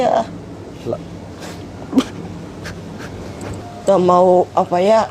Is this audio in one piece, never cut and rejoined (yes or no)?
no